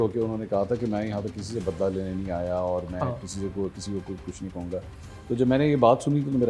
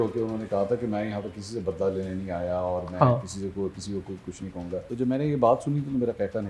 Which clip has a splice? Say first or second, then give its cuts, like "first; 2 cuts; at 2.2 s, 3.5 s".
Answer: second; 1 cut; at 4.8 s